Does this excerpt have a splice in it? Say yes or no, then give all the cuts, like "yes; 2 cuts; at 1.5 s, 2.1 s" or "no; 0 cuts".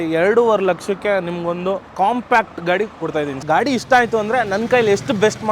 yes; 2 cuts; at 1.9 s, 3.4 s